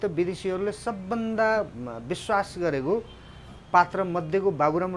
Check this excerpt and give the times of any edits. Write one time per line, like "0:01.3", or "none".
none

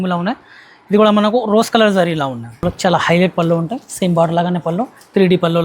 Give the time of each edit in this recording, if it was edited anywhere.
0:02.6

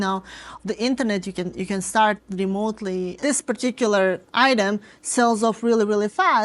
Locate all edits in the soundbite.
0:03.2

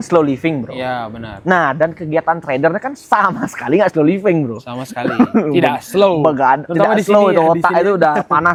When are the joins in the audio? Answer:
none

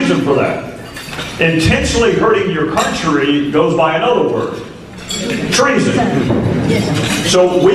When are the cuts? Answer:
none

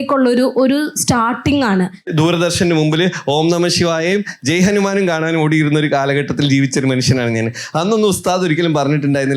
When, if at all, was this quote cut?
0:02.1

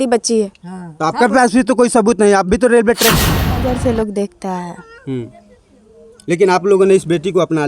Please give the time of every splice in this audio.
0:03.6

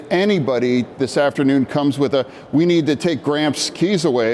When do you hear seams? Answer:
none

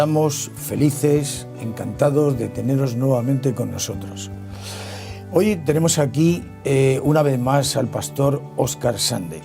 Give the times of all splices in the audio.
0:06.7

